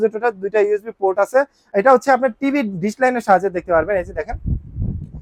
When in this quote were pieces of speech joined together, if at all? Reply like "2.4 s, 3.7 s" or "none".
1.6 s